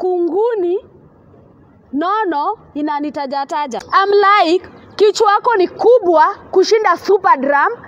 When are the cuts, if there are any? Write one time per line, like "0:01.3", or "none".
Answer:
0:03.8